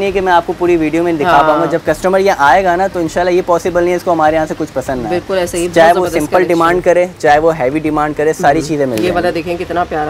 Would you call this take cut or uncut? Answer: uncut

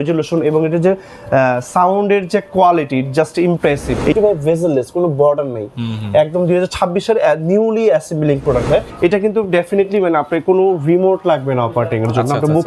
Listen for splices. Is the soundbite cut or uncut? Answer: cut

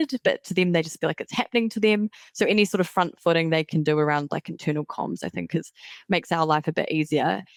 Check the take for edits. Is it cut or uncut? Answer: uncut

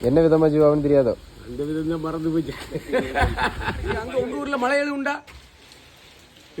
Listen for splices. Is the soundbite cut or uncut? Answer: cut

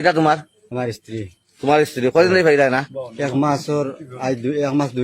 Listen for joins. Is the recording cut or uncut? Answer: uncut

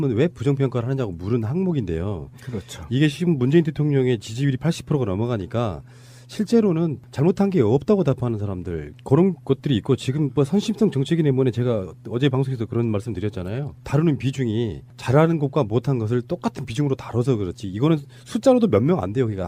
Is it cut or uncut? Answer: uncut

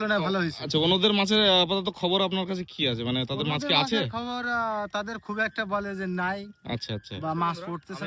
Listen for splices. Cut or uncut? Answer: uncut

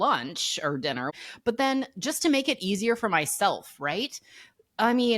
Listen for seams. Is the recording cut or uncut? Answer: cut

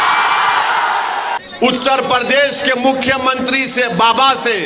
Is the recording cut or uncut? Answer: cut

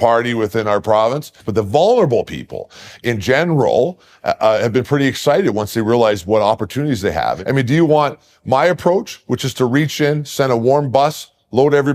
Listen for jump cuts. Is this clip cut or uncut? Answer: cut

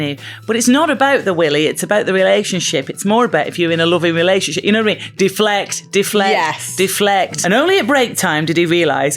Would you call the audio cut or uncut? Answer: cut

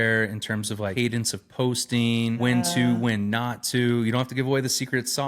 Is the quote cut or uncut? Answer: cut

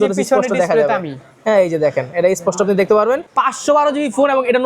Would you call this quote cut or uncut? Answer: cut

